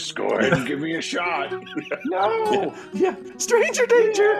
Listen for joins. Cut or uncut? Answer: cut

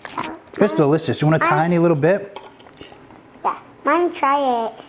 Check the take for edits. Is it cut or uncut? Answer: uncut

